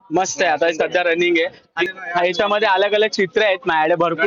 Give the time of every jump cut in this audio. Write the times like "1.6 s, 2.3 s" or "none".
1.7 s